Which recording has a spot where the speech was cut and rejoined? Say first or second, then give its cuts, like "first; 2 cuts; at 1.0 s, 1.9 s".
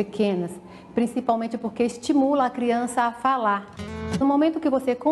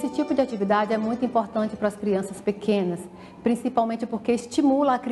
first; 1 cut; at 4.2 s